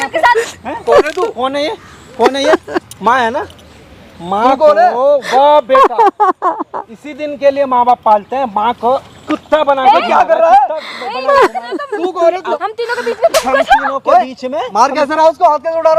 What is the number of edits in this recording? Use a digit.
1